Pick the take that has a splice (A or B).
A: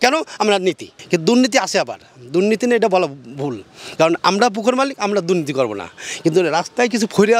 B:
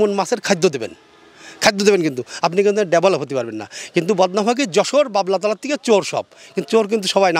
A